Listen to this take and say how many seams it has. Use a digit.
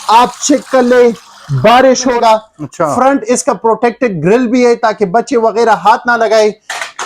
1